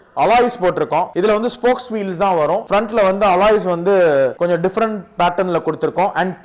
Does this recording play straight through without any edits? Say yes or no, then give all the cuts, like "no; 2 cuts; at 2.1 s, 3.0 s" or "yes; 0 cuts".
no; 3 cuts; at 1.1 s, 2.6 s, 4.3 s